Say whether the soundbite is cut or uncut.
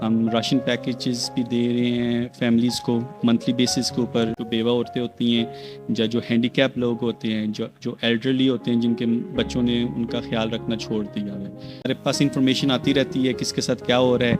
cut